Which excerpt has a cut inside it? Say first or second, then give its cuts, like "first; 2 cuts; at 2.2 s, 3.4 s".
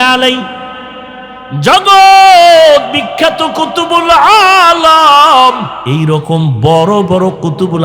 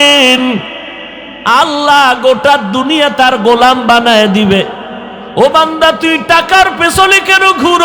first; 1 cut; at 5.7 s